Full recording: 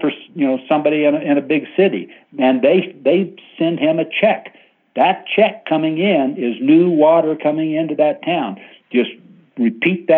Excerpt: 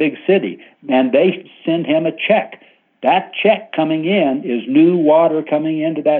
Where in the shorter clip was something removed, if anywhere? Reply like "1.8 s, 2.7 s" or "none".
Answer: 1.4 s